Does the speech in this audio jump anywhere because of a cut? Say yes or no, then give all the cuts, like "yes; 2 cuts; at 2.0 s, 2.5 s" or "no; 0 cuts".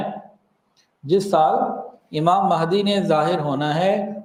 no; 0 cuts